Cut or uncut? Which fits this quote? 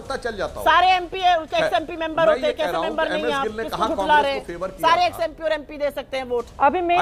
uncut